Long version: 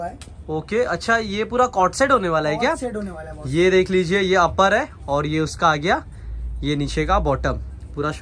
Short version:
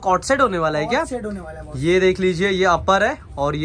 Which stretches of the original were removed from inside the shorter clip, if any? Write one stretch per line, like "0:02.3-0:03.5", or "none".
none